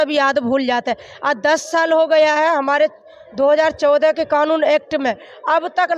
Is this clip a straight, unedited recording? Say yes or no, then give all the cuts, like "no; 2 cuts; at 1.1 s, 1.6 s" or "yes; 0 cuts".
yes; 0 cuts